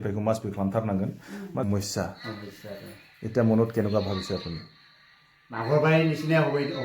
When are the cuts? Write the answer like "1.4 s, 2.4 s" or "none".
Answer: 1.6 s